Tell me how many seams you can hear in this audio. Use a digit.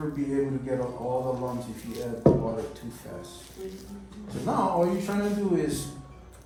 0